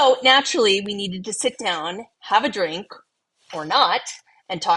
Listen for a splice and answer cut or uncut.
uncut